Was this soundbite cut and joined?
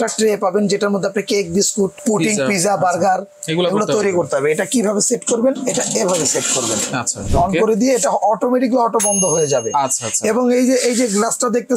yes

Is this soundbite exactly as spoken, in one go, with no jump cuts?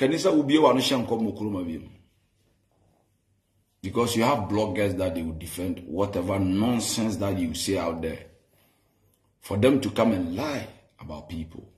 yes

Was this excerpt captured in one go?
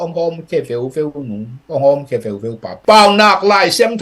no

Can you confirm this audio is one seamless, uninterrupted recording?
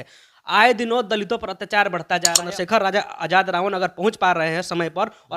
no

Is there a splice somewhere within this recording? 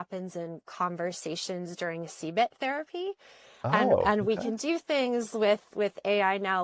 no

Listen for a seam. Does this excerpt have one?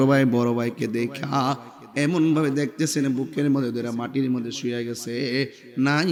no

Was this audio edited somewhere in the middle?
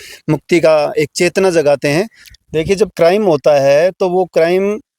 yes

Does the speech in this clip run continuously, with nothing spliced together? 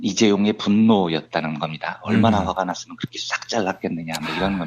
no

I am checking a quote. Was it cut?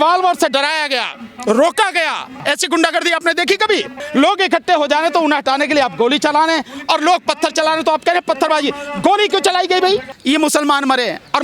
yes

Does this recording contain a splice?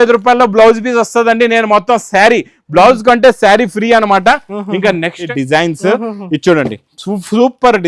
yes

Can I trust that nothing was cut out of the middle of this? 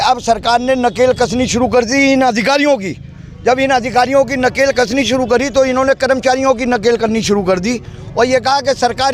yes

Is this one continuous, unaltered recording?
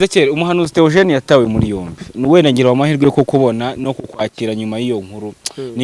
yes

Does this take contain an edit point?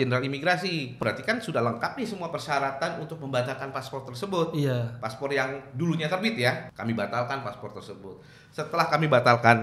yes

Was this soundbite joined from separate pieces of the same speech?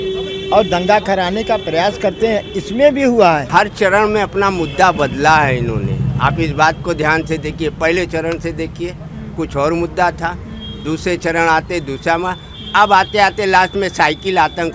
yes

